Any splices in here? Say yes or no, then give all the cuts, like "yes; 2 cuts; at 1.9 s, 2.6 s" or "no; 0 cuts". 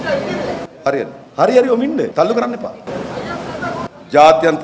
yes; 3 cuts; at 1.2 s, 2.1 s, 2.8 s